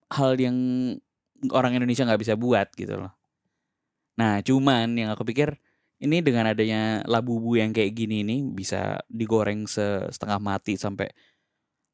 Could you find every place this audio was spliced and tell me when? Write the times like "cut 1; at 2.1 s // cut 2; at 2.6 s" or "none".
none